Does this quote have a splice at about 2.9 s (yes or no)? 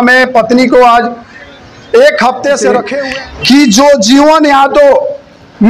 yes